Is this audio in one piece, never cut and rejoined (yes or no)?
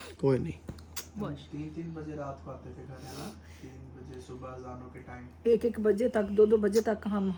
yes